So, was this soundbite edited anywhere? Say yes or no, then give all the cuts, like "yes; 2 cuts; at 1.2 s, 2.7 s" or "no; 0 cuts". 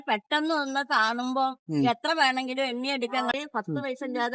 yes; 1 cut; at 3.2 s